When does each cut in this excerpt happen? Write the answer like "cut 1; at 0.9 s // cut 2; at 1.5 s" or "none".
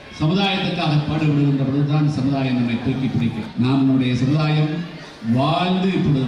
cut 1; at 3.4 s